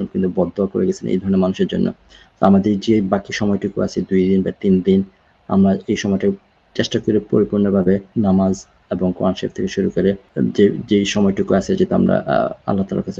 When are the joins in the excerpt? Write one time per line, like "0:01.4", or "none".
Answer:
0:08.1
0:10.3